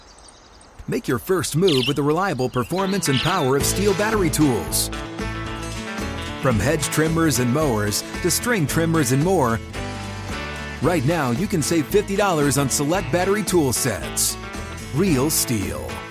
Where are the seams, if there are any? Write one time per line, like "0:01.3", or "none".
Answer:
none